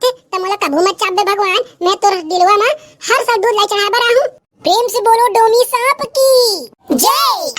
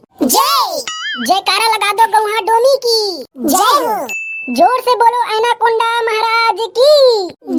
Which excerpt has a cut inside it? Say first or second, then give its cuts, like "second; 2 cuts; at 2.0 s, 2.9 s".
first; 1 cut; at 4.5 s